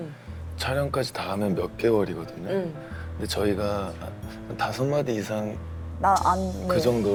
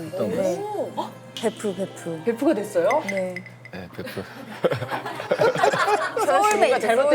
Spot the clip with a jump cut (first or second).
second